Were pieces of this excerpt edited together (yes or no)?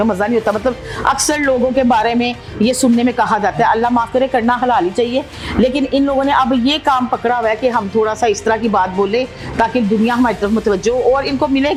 no